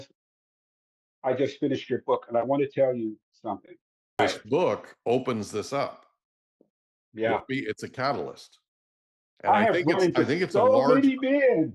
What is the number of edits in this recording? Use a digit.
1